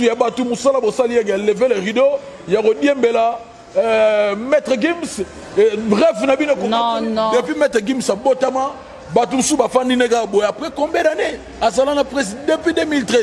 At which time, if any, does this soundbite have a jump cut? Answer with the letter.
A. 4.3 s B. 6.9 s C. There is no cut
C